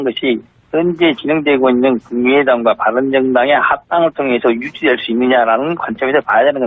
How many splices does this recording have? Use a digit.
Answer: 0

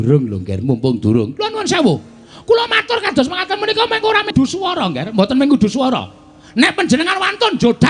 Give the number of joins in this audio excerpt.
1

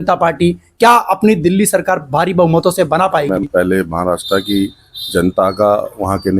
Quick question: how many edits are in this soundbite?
1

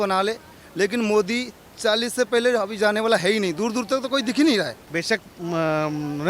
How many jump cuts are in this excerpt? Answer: 1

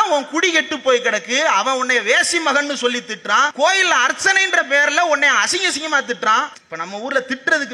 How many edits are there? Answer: 2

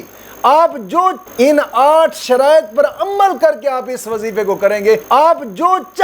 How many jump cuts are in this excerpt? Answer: 2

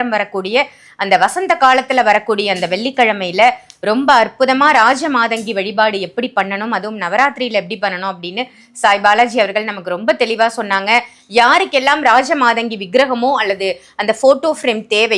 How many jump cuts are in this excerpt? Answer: 0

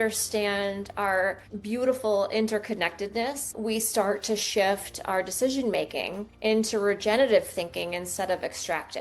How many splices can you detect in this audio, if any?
3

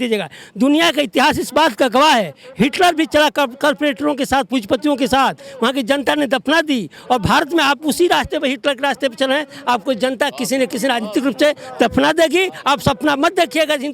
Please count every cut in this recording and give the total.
0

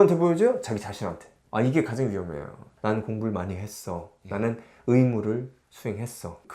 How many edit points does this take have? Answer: 1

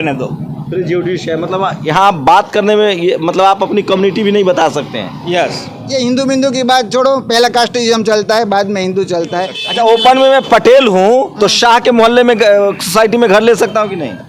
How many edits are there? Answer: 2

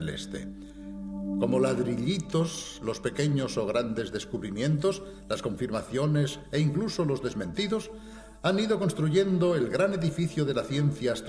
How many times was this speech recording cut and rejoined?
0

